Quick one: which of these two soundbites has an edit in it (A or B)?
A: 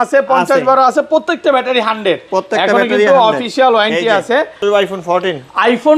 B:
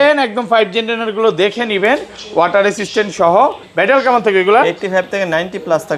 A